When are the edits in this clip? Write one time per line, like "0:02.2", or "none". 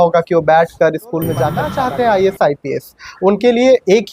0:01.6